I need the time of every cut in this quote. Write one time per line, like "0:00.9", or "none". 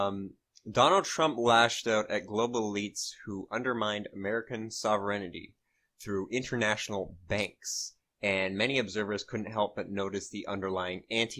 0:04.3